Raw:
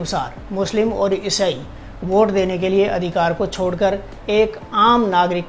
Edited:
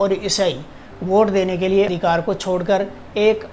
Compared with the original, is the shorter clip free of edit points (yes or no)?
no